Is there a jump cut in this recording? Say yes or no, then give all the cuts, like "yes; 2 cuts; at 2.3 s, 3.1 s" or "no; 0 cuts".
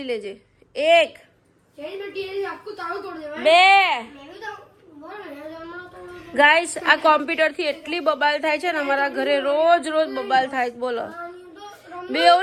no; 0 cuts